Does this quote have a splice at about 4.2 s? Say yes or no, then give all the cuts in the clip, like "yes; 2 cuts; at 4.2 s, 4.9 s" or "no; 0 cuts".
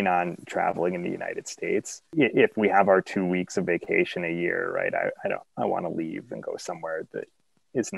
no; 1 cut; at 2.0 s